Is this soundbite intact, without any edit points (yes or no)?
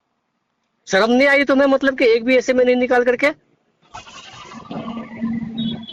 yes